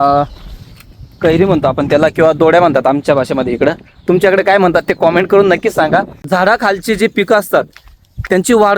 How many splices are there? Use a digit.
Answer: 1